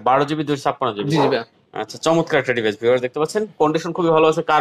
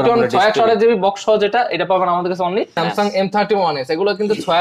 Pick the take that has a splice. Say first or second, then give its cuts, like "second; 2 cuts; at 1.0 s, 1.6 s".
second; 1 cut; at 2.7 s